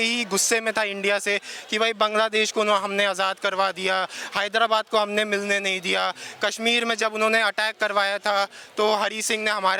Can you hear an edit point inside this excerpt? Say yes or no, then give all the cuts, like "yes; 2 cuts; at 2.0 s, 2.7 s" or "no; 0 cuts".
no; 0 cuts